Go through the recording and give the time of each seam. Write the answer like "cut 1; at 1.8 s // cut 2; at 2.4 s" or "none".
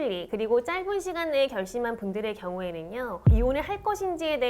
cut 1; at 3.2 s